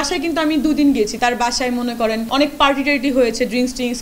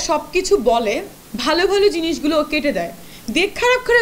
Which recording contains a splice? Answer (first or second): first